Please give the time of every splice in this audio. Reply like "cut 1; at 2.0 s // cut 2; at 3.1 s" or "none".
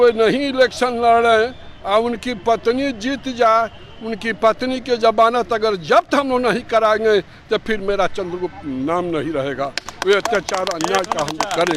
none